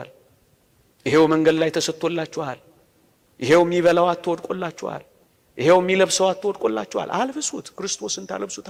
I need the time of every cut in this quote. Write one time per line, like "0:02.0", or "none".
none